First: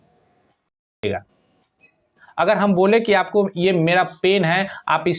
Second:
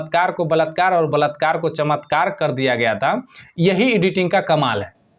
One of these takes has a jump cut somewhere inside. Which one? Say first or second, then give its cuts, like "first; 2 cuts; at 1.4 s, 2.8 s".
first; 1 cut; at 1.0 s